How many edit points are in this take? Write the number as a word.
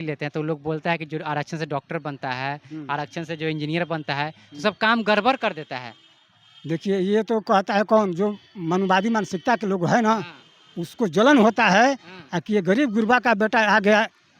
zero